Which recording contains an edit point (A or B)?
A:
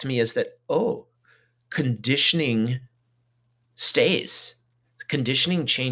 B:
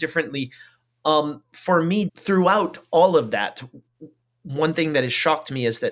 B